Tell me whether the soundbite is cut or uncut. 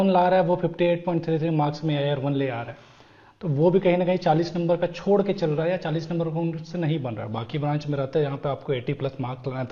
uncut